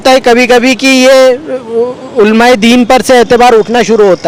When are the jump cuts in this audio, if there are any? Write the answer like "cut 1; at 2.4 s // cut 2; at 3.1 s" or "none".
none